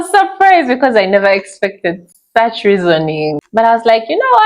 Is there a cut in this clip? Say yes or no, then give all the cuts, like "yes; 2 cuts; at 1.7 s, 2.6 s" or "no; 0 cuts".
yes; 1 cut; at 3.4 s